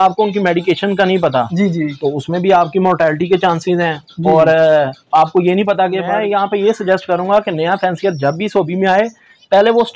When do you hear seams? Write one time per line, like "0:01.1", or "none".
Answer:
0:06.0

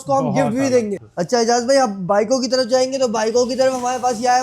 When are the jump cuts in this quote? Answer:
0:01.0

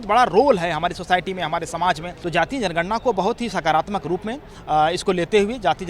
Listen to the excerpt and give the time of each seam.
0:02.1

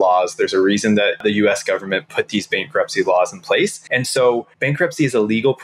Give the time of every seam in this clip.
0:01.2
0:03.8
0:04.5

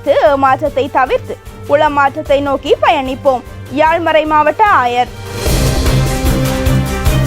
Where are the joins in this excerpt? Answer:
0:05.4

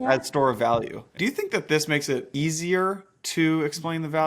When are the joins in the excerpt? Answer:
0:01.1
0:02.3

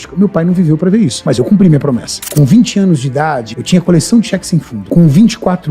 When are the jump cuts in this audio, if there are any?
0:01.2
0:02.2
0:03.5
0:04.8

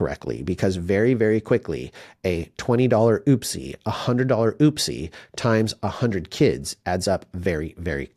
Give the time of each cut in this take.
none

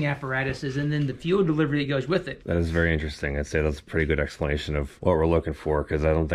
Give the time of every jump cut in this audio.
0:02.3
0:04.9

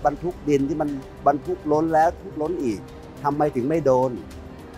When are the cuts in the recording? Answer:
none

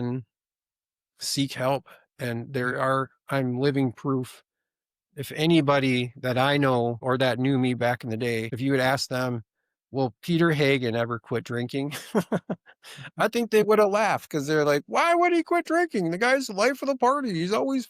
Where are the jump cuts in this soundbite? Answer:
0:07.0
0:08.5

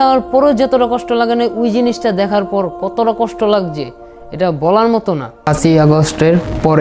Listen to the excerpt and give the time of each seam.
0:05.3

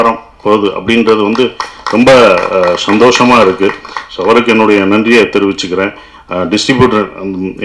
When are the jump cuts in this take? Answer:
none

